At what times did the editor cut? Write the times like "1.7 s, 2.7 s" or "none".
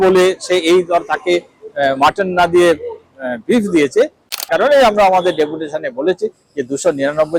4.3 s